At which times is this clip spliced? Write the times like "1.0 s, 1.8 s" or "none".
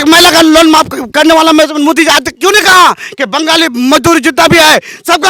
none